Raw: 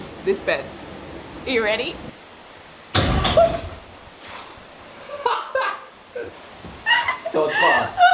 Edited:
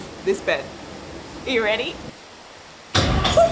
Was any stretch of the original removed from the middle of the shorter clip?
no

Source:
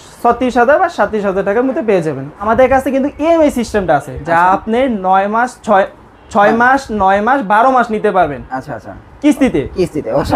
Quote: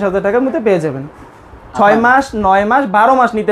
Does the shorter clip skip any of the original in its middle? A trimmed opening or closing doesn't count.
yes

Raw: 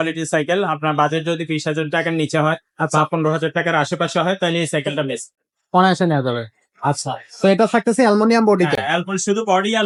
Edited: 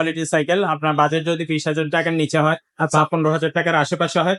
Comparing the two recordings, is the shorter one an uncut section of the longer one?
yes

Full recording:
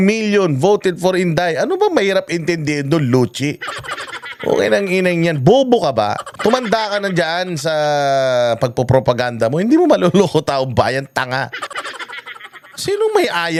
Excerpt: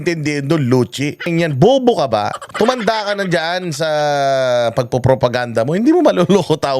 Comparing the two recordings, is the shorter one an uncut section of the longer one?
no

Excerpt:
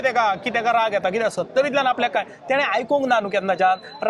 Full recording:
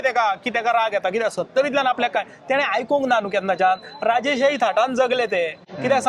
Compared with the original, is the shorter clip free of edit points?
yes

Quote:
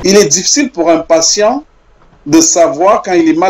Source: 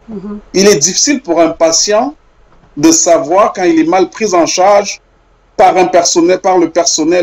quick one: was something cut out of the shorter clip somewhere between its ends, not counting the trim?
no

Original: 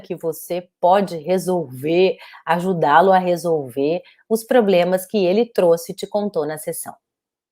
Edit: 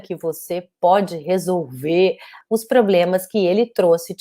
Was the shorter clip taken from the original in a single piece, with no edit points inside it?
no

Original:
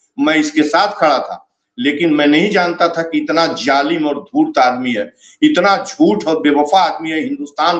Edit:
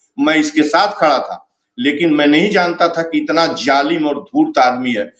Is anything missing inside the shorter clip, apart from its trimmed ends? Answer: no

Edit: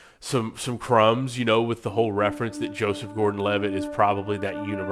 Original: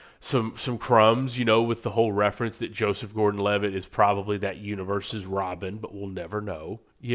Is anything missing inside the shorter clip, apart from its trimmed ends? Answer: no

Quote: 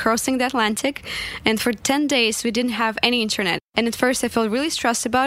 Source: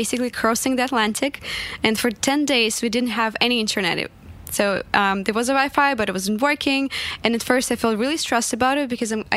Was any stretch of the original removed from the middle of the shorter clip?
yes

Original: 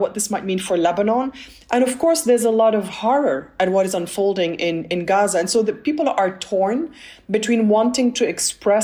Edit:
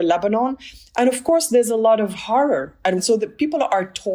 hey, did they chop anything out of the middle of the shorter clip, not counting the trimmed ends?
yes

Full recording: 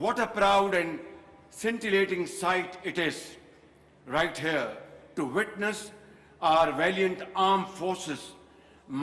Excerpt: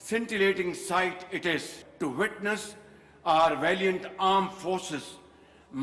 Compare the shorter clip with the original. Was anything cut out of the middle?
yes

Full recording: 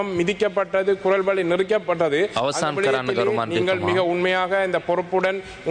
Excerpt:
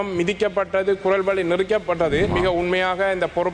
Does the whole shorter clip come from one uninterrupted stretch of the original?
no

